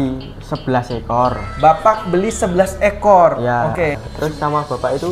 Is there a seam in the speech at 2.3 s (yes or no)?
no